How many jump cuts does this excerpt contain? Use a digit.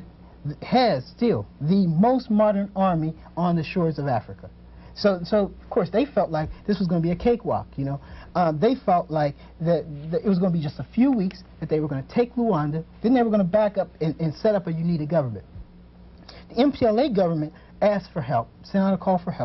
0